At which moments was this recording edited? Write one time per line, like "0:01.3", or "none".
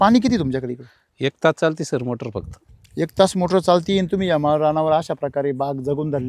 0:02.5